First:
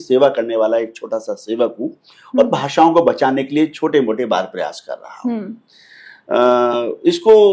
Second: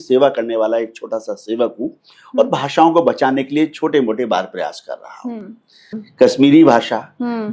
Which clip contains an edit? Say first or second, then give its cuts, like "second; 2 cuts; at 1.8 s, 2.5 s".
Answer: second; 1 cut; at 6.0 s